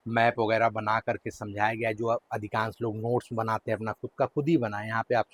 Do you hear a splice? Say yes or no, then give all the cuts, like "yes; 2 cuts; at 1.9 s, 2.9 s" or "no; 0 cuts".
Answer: no; 0 cuts